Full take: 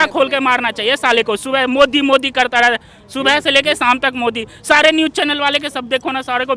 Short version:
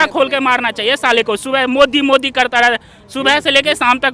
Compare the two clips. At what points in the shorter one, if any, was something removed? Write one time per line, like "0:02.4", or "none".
none